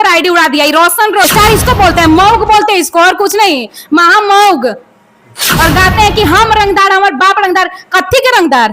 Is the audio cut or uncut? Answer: cut